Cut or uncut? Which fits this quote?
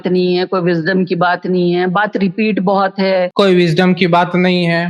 cut